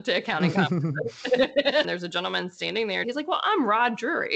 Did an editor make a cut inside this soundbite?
yes; 2 cuts; at 1.8 s, 3.0 s

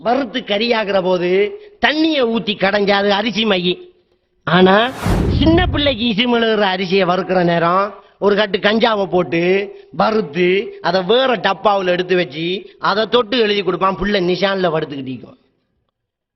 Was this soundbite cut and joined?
no; 0 cuts

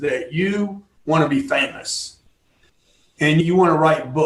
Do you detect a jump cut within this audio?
no; 0 cuts

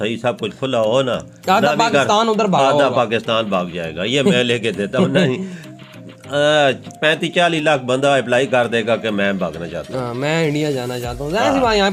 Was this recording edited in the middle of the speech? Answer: no; 0 cuts

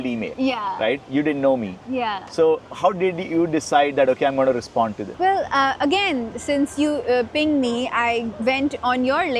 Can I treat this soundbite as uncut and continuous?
yes; 0 cuts

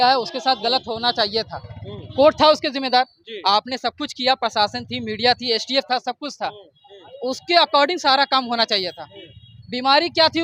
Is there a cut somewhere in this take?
no; 0 cuts

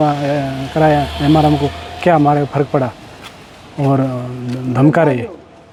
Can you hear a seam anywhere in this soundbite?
no; 0 cuts

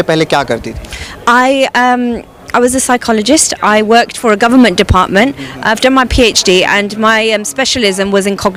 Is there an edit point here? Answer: no; 0 cuts

